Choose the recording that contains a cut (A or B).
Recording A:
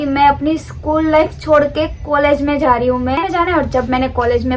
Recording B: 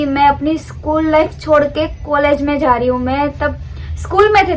A